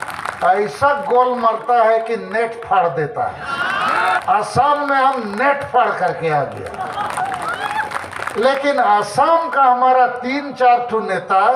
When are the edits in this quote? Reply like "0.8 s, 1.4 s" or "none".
4.2 s

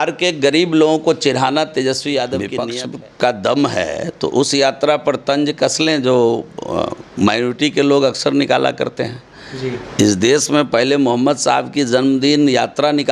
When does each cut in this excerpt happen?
2.6 s

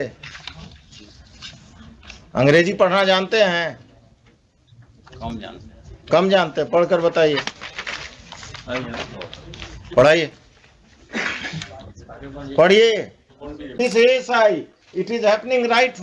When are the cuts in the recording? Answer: 13.8 s

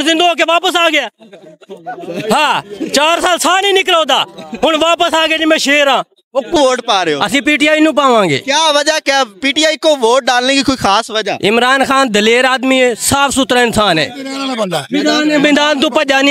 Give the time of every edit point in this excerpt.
6.5 s

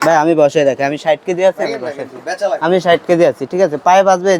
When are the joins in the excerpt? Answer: none

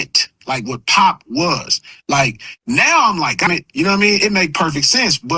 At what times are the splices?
3.5 s

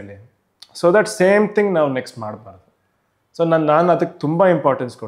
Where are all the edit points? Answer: none

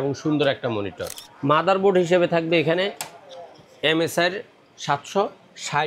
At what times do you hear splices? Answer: 1.2 s

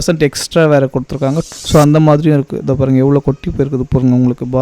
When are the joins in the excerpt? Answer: 1.4 s

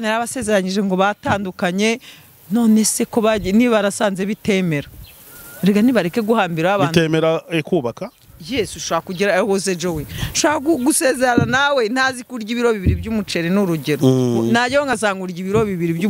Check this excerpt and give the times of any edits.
none

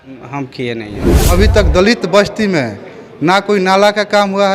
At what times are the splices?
1.3 s

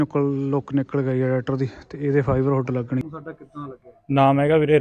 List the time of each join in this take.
3.0 s

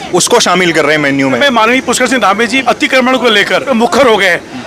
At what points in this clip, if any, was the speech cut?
1.4 s, 2.6 s, 3.6 s

